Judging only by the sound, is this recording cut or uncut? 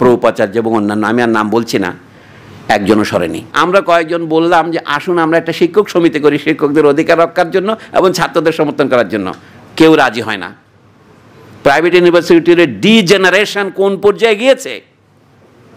cut